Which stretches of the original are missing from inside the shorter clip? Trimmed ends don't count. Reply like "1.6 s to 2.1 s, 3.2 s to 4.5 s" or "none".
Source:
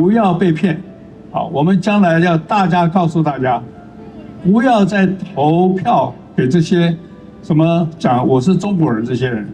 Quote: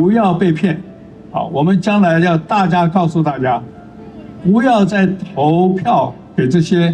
none